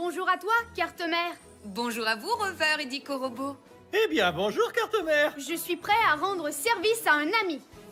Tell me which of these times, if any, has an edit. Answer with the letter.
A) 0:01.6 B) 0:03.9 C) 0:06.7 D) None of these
D